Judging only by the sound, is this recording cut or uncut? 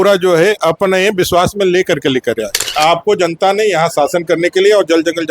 cut